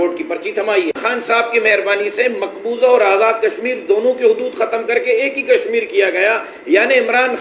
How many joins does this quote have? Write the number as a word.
one